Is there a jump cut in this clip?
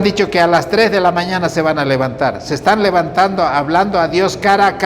no; 0 cuts

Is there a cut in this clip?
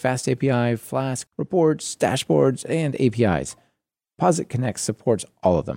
yes; 1 cut; at 1.3 s

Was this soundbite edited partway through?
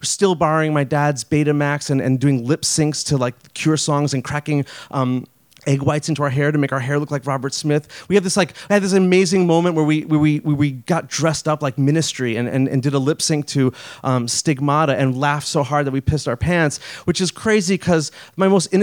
no; 0 cuts

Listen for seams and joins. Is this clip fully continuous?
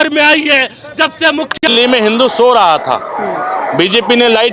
no; 1 cut; at 1.6 s

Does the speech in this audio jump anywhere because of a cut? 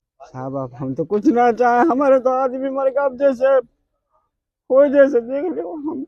no; 0 cuts

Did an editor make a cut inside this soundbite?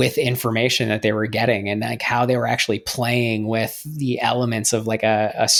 no; 0 cuts

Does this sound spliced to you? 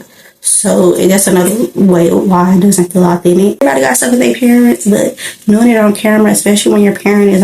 yes; 1 cut; at 3.6 s

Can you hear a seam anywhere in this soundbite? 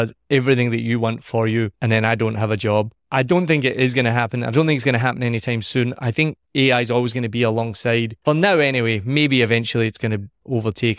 yes; 3 cuts; at 1.8 s, 3.0 s, 8.1 s

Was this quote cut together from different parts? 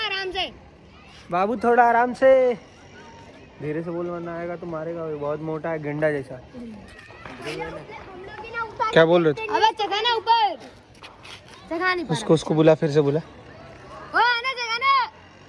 no; 0 cuts

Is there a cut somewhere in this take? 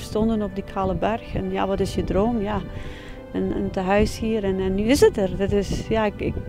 no; 0 cuts

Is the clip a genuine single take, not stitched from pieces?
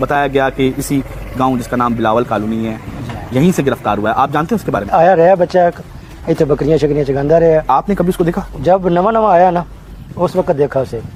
yes; 0 cuts

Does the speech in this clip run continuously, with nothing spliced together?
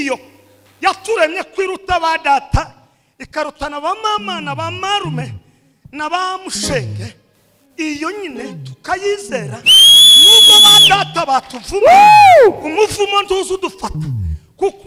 yes; 0 cuts

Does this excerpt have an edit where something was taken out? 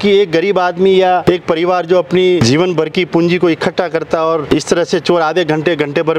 yes; 3 cuts; at 1.2 s, 2.4 s, 4.5 s

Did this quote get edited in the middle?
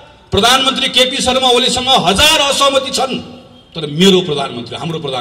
no; 0 cuts

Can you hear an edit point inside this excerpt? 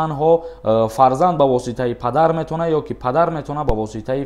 no; 0 cuts

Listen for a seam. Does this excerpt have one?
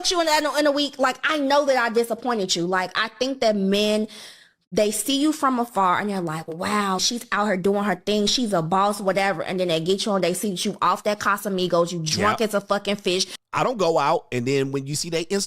no; 0 cuts

